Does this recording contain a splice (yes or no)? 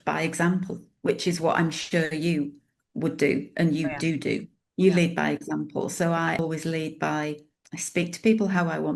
yes